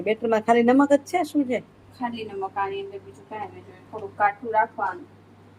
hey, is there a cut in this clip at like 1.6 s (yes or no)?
no